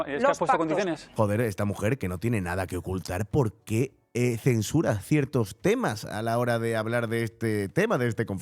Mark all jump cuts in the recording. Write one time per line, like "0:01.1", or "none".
none